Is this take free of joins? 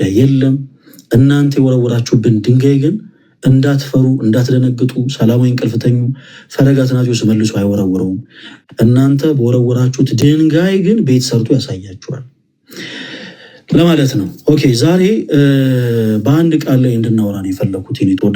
yes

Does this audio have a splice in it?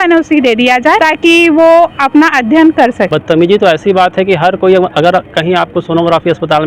yes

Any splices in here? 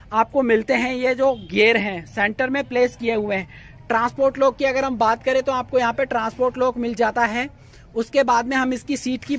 no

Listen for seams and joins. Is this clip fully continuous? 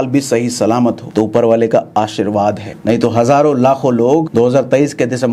no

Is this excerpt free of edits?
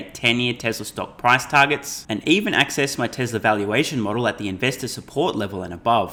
yes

